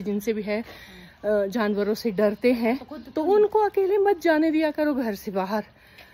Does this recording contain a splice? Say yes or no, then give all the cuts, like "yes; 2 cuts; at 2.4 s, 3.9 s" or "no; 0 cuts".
no; 0 cuts